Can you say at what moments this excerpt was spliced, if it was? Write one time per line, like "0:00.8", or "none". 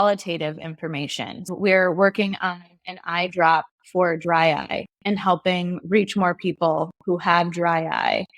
0:01.5

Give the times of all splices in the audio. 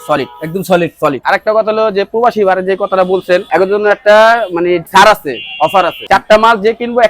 0:01.2
0:03.5
0:06.0

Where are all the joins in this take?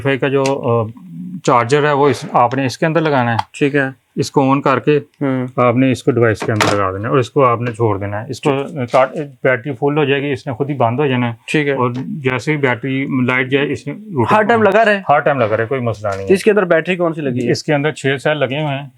none

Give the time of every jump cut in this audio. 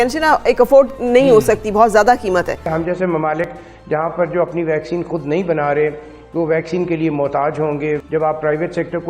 0:02.7
0:08.0

